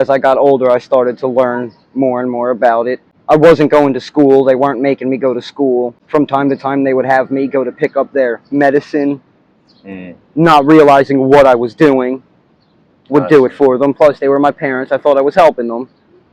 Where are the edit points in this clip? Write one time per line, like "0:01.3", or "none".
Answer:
0:03.1
0:06.0